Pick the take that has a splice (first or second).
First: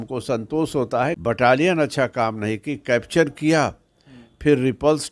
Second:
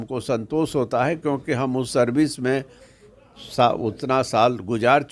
first